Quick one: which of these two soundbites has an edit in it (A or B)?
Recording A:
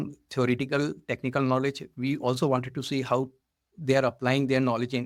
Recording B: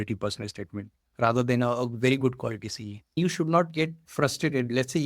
B